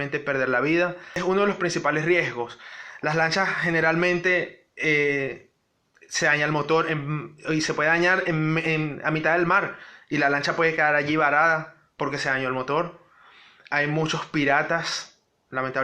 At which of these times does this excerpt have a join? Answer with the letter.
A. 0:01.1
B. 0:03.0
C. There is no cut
A